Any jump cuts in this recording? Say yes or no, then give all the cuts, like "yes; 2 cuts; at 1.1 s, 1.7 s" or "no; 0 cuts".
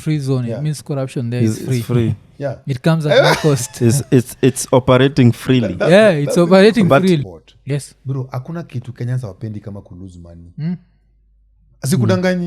yes; 1 cut; at 7.2 s